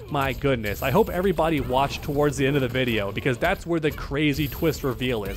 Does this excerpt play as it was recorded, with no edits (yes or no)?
yes